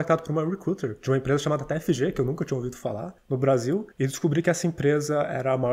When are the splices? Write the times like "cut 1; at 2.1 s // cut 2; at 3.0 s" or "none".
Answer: cut 1; at 0.9 s // cut 2; at 3.1 s // cut 3; at 3.9 s